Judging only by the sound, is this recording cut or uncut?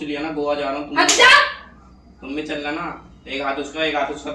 uncut